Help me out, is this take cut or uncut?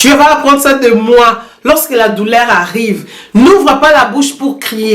uncut